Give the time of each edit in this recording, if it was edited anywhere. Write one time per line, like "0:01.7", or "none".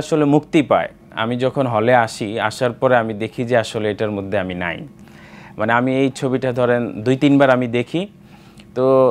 none